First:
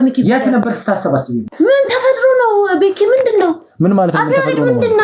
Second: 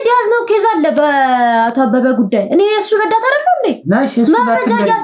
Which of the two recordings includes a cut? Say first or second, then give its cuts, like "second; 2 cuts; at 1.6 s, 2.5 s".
first; 1 cut; at 1.5 s